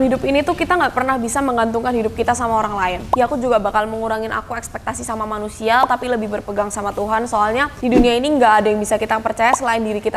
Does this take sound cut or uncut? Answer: cut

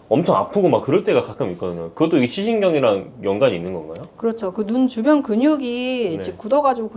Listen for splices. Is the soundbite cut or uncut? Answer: uncut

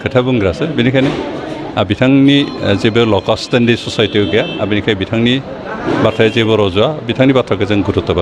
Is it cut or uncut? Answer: uncut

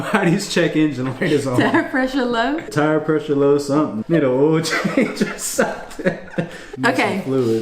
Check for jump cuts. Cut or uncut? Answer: cut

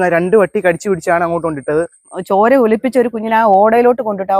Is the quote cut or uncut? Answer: cut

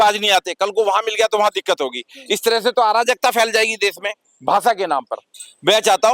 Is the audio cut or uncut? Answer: uncut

